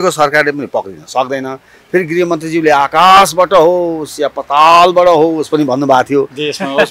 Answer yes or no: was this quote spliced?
no